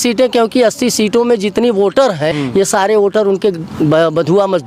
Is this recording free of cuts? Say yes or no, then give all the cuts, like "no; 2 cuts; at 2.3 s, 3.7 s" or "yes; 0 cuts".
no; 1 cut; at 2.4 s